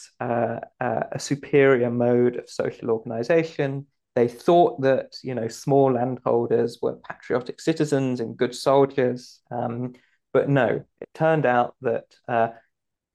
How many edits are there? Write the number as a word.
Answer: zero